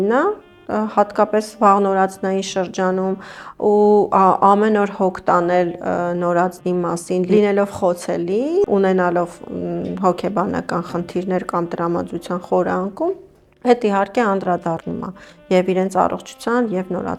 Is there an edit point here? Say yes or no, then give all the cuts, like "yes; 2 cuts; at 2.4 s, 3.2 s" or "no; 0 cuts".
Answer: no; 0 cuts